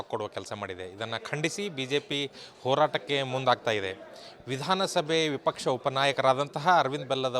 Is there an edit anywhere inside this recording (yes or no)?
no